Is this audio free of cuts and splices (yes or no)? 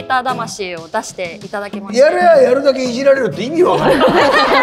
yes